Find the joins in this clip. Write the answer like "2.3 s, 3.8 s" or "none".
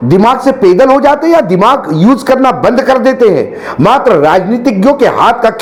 none